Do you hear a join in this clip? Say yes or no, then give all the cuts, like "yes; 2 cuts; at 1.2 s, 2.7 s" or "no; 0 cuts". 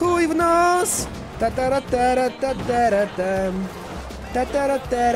no; 0 cuts